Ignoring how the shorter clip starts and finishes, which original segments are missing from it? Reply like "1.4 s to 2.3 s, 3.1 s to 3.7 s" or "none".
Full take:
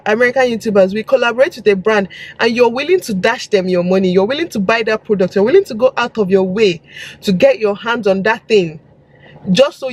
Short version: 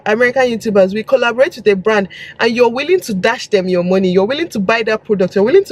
none

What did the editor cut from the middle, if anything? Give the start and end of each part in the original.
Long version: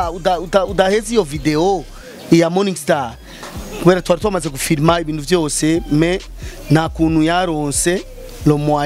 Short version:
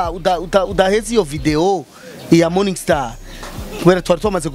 none

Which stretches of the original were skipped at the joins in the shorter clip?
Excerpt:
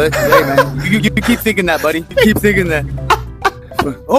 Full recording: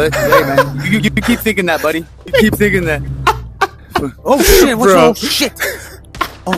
2.0 s to 2.2 s

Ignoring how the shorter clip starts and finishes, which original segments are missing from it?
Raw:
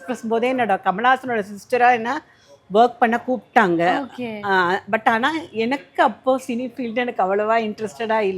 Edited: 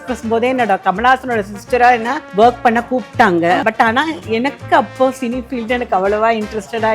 2.2 s to 2.5 s, 4.0 s to 4.9 s

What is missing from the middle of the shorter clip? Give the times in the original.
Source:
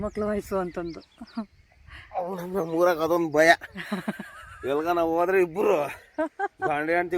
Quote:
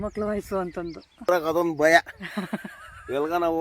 1.3 s to 2.8 s

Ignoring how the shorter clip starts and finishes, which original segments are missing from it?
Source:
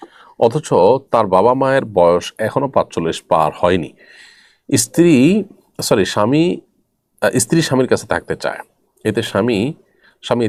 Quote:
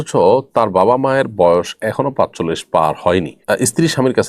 3.9 s to 7.1 s

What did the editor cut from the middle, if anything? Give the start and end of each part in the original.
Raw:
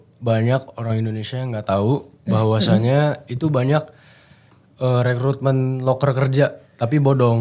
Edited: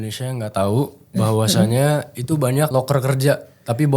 3.8 s to 5.8 s

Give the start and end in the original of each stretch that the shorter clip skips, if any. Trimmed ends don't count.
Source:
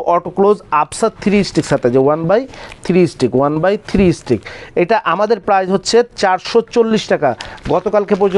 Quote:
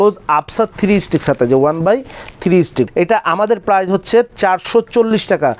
3.3 s to 4.7 s

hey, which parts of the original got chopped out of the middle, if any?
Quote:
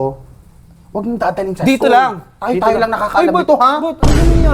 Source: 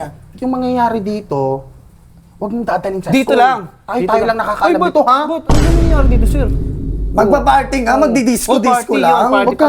none

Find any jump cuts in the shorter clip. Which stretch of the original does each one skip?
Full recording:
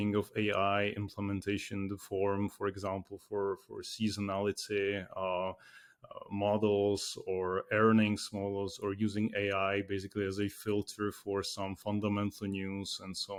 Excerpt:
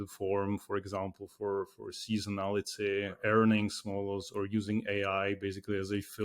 5.1 s to 7.6 s

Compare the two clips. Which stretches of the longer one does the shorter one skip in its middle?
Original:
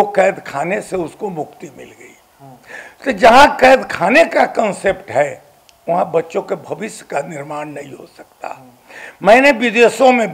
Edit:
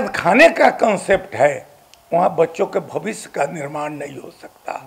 none

